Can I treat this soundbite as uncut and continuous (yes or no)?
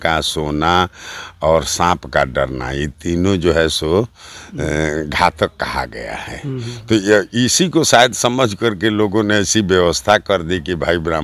yes